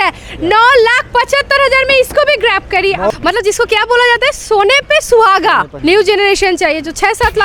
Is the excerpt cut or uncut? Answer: cut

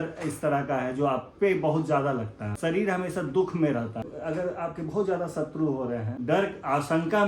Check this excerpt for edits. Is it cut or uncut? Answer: cut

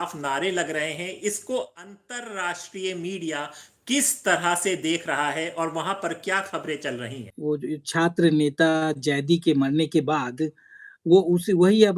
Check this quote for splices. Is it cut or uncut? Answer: cut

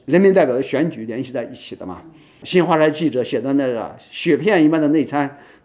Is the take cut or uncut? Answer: cut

